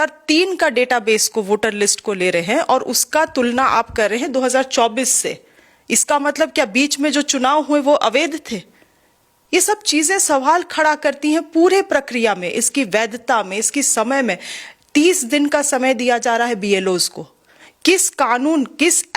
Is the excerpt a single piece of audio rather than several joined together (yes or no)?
yes